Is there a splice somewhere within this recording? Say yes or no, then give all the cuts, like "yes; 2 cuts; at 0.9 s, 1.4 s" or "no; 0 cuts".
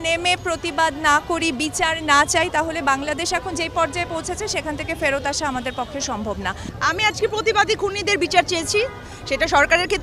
no; 0 cuts